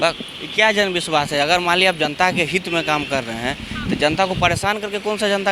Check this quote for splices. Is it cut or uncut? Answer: uncut